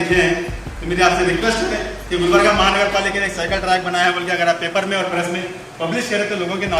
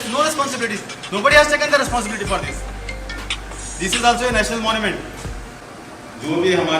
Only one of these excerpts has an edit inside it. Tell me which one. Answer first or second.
second